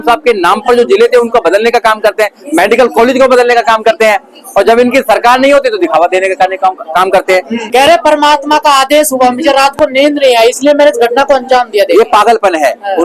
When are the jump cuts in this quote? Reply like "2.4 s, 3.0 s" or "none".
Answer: 7.6 s